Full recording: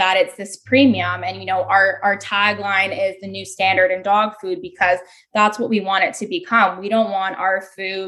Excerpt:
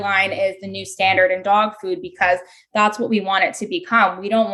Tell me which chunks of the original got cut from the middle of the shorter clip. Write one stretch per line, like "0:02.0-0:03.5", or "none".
none